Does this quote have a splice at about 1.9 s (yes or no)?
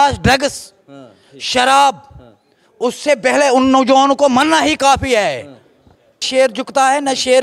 no